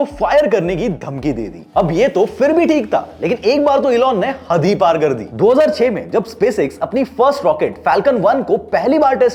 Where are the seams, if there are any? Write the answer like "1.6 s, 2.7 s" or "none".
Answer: none